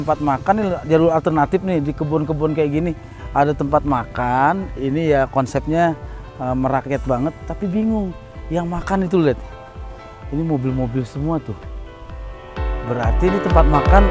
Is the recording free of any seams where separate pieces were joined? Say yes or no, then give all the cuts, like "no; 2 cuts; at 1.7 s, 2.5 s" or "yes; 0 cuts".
yes; 0 cuts